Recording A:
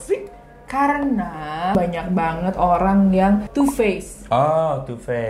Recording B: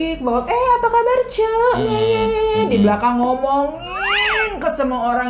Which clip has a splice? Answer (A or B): A